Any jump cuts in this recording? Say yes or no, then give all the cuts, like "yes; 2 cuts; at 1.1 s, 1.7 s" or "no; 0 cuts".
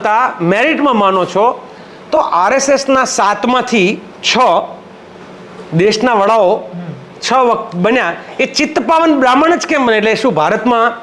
no; 0 cuts